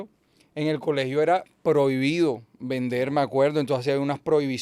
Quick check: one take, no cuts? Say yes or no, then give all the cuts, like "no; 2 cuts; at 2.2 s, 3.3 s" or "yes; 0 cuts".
yes; 0 cuts